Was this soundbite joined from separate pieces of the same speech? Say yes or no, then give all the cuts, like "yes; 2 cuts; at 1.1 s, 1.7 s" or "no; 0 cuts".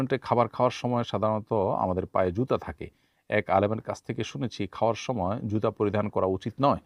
no; 0 cuts